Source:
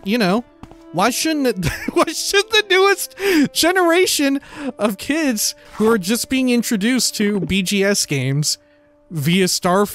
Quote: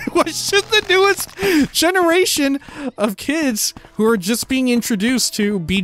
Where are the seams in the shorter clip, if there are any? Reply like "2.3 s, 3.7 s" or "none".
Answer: none